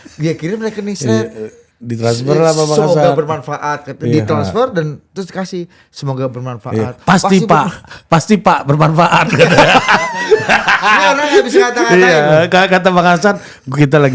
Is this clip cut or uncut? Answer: uncut